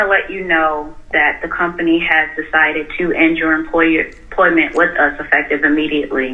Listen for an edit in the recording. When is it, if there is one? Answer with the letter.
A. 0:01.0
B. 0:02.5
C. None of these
C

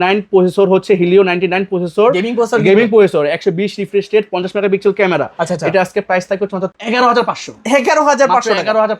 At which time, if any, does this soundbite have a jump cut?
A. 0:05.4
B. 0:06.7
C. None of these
B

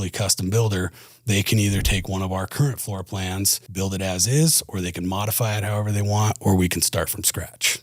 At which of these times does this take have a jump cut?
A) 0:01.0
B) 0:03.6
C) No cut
B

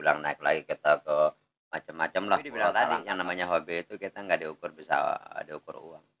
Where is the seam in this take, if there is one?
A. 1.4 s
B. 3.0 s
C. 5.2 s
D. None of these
B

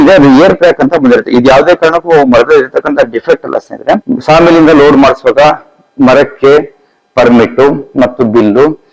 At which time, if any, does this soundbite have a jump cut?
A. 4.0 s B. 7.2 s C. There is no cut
A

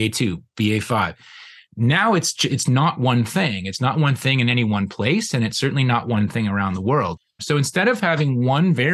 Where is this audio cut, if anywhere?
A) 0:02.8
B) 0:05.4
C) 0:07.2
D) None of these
C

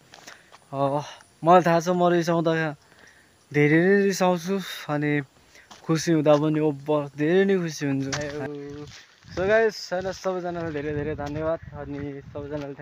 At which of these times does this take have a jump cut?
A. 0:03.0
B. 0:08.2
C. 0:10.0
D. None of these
B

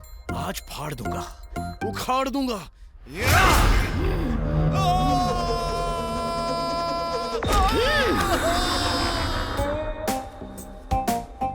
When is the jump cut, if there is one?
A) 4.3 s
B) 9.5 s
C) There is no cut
B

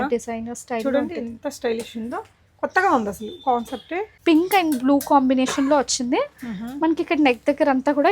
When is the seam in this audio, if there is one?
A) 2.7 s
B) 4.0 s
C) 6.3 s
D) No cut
B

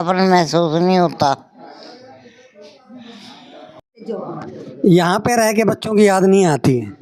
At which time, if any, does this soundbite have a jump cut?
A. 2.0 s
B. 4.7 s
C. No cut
C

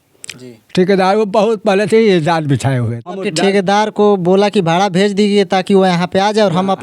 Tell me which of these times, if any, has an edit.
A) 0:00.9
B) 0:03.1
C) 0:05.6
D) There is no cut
B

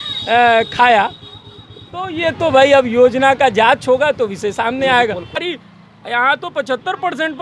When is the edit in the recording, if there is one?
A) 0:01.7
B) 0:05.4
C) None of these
B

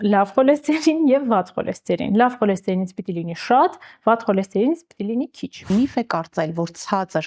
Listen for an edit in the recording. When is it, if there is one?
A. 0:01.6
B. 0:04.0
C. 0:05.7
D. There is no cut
C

